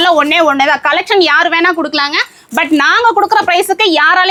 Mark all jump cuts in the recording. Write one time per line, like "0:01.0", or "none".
none